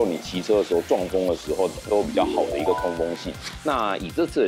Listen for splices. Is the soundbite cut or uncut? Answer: cut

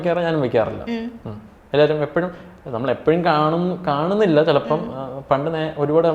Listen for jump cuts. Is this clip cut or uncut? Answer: uncut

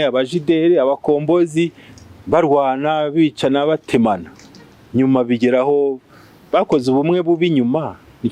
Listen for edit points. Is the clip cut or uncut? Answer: uncut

